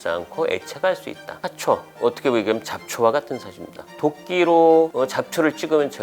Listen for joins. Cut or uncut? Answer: cut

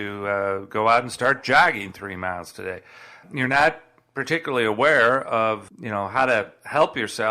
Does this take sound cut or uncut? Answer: cut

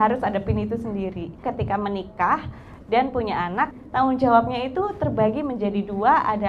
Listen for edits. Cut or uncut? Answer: cut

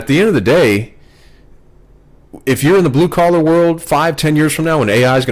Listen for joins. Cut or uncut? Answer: uncut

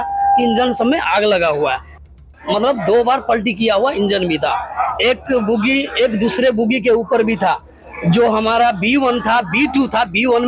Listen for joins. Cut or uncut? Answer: cut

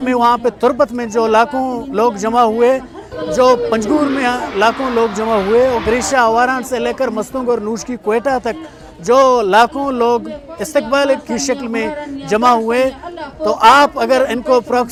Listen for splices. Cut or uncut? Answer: uncut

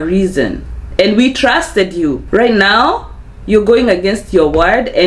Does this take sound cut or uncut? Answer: cut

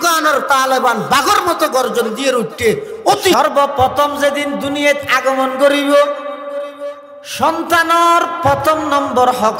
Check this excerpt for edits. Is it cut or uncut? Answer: cut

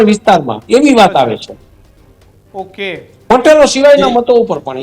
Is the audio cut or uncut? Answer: uncut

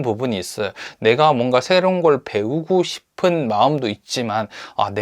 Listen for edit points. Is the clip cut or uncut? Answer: uncut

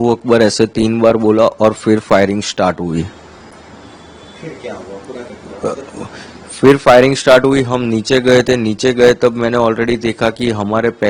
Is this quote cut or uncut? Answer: uncut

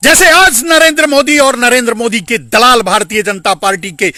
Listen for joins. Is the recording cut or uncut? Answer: uncut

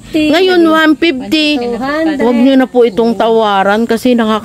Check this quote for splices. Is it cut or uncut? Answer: uncut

